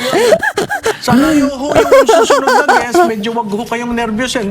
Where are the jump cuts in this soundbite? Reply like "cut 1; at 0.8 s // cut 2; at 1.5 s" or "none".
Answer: cut 1; at 1.0 s